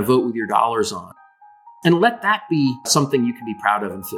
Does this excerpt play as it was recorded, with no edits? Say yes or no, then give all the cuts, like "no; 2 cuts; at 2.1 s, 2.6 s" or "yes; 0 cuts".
no; 2 cuts; at 1.3 s, 2.9 s